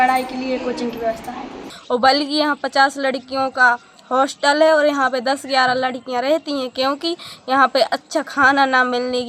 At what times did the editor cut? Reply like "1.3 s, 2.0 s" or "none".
1.7 s